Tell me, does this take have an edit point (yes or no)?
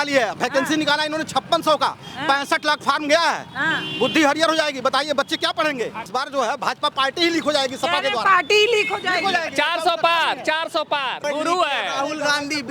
yes